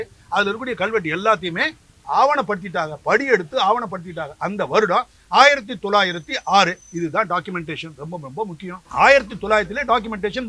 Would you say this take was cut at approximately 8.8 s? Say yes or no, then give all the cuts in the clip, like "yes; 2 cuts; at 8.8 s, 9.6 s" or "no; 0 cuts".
yes; 1 cut; at 8.8 s